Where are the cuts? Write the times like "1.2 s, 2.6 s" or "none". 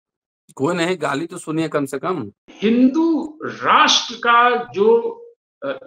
2.4 s